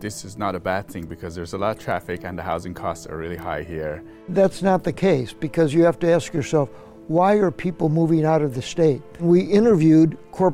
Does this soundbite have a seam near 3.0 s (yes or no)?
no